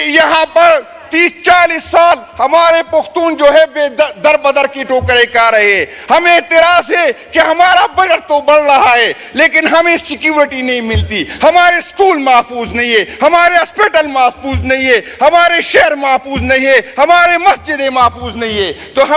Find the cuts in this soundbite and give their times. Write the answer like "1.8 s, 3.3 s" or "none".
none